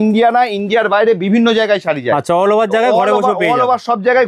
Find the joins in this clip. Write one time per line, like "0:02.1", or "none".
none